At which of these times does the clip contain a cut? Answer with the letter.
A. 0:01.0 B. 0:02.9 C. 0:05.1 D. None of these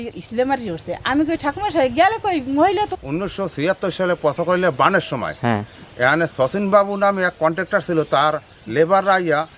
B